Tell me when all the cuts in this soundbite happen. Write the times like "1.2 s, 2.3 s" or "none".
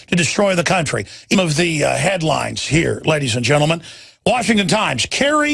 none